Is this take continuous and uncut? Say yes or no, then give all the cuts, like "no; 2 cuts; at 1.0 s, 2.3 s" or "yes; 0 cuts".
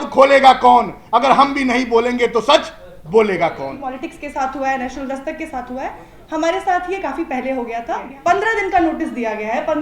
no; 2 cuts; at 3.9 s, 8.1 s